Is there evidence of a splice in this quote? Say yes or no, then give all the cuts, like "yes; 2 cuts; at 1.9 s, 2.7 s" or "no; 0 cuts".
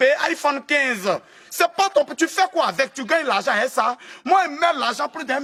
no; 0 cuts